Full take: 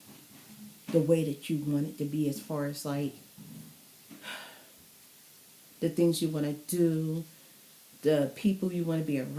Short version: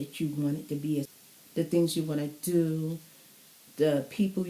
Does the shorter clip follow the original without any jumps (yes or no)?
no